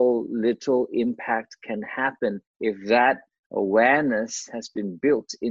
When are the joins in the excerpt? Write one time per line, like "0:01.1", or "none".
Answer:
0:02.5